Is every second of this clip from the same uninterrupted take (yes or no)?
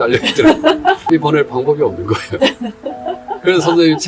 no